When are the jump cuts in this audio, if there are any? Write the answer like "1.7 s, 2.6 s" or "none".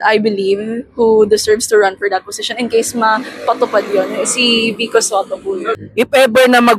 5.7 s